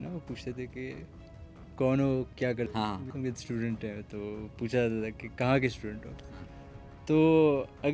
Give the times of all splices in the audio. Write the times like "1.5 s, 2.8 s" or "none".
none